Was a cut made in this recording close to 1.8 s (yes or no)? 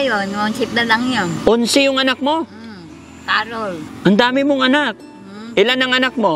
no